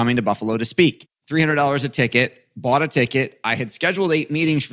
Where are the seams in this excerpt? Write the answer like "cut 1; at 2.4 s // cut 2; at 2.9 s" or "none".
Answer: cut 1; at 1.1 s